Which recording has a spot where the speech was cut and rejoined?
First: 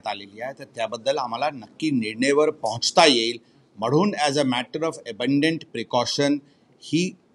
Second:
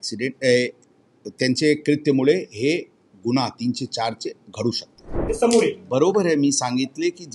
second; 1 cut; at 5.3 s

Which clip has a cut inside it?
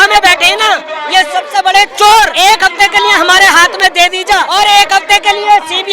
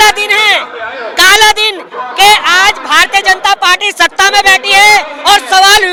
first; 2 cuts; at 2.3 s, 4.5 s

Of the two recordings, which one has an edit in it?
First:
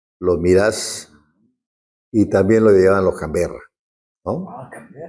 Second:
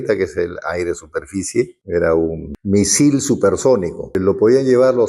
second; 3 cuts; at 1.8 s, 2.5 s, 4.2 s

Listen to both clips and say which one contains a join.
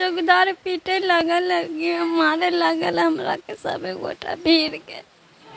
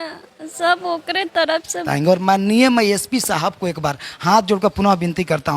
second; 1 cut; at 1.9 s

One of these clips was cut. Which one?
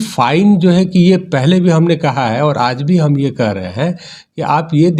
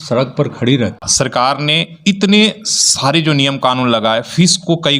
second; 1 cut; at 1.1 s

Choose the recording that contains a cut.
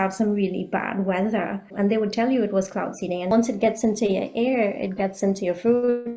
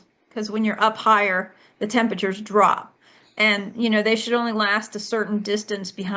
first; 2 cuts; at 1.7 s, 3.3 s

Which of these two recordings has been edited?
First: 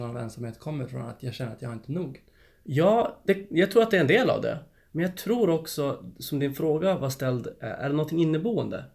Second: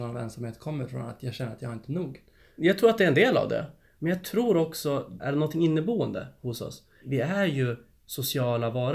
second; 3 cuts; at 2.5 s, 5.2 s, 7.0 s

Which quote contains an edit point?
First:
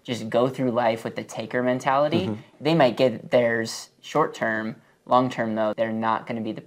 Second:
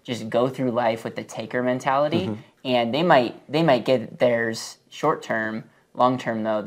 first; 2 cuts; at 2.5 s, 5.7 s

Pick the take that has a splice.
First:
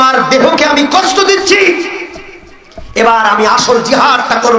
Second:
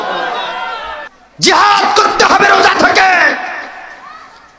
second; 1 cut; at 1.1 s

